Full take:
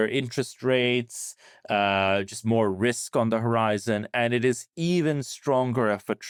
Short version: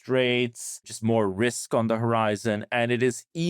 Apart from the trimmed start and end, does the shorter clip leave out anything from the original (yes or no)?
yes